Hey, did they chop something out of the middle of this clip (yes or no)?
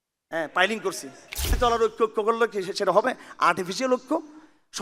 yes